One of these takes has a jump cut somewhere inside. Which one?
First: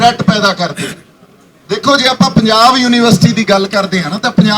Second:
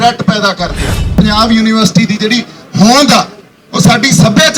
second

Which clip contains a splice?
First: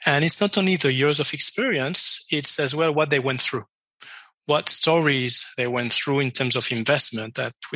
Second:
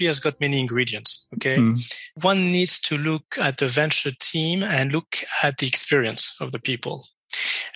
second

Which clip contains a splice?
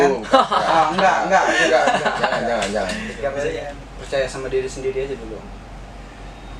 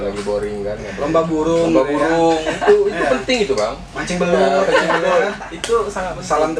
first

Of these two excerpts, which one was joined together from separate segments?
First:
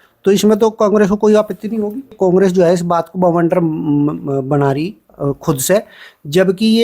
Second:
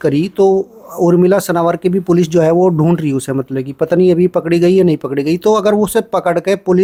first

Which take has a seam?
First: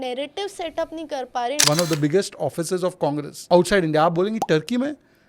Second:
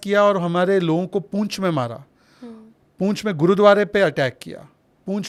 first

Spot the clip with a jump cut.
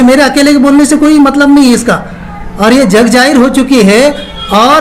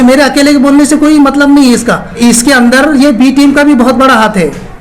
second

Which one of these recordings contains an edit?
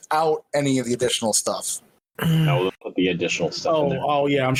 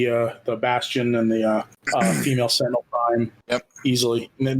second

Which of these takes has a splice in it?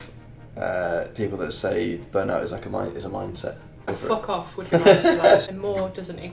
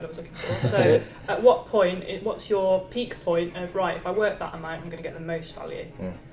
first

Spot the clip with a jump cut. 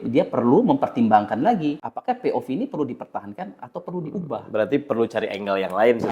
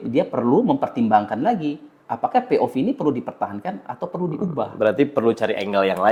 first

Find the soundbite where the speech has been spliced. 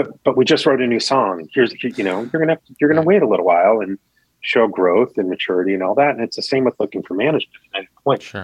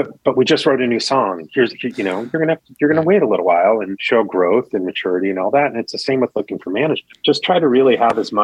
second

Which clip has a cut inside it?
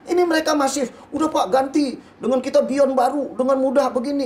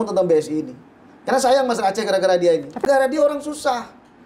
second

